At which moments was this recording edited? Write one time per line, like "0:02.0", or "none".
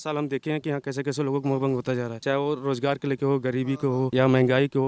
0:02.1
0:04.1